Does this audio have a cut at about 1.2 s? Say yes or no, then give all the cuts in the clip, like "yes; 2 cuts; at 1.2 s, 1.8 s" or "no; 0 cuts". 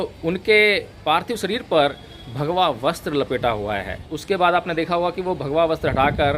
no; 1 cut; at 4.1 s